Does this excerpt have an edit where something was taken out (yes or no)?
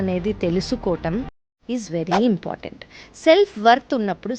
no